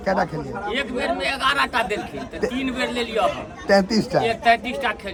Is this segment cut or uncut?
uncut